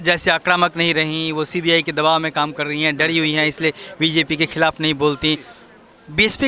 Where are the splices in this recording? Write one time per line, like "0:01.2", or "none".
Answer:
0:05.5